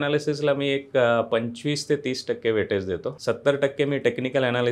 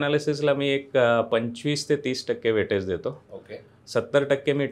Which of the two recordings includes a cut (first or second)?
first